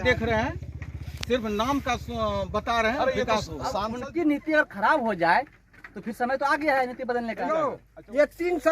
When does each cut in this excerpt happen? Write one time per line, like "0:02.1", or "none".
0:03.9
0:07.5